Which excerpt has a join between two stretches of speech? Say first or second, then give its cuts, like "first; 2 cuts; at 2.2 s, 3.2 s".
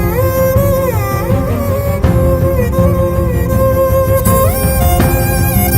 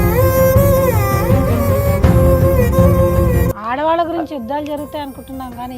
second; 1 cut; at 3.5 s